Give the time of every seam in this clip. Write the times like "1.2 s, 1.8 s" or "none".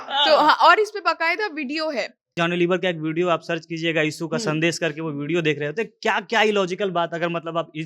2.3 s